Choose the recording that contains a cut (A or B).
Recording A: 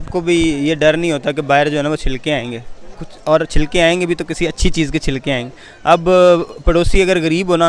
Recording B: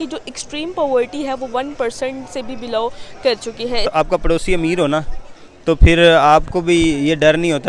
B